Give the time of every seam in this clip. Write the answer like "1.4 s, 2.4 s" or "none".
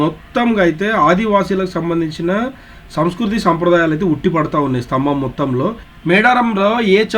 5.9 s